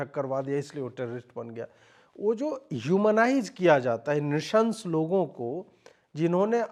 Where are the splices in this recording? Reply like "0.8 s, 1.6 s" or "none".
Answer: none